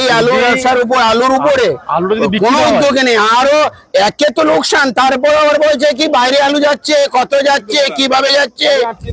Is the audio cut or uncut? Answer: uncut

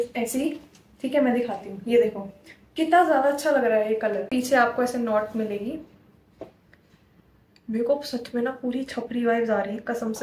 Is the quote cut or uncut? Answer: cut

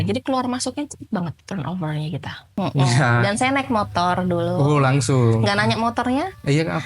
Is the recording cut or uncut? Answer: cut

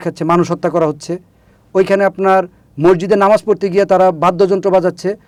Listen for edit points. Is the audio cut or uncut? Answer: uncut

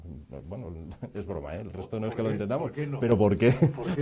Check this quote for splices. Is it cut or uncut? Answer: cut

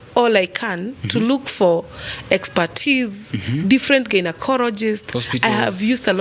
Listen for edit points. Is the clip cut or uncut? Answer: uncut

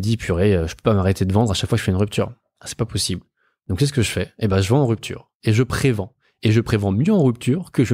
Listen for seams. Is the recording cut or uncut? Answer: uncut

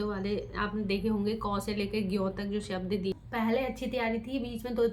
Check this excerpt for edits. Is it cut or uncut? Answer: cut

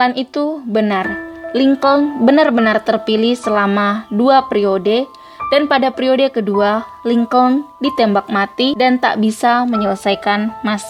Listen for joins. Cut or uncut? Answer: uncut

